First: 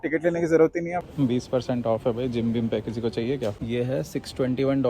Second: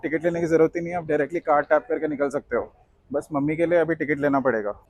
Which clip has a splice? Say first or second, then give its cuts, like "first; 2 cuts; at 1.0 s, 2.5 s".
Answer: first; 2 cuts; at 1.0 s, 3.6 s